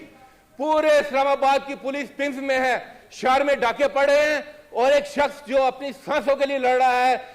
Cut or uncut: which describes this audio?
uncut